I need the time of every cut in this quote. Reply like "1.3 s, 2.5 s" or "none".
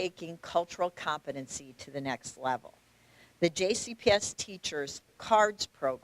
5.1 s